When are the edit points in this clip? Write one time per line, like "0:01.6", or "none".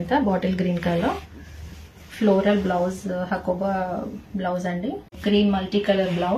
0:05.2